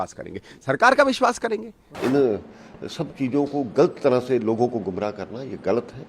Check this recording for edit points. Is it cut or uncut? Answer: cut